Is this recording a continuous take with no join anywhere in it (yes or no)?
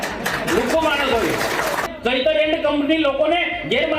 no